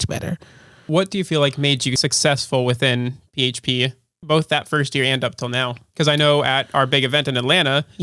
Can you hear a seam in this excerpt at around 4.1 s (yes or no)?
yes